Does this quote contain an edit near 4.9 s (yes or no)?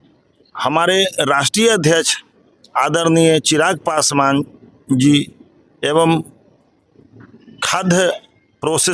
no